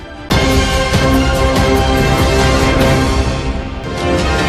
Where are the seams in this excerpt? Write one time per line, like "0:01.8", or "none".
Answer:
0:03.5